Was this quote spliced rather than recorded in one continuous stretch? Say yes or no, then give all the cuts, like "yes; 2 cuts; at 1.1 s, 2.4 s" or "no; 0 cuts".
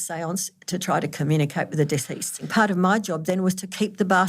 yes; 1 cut; at 2.5 s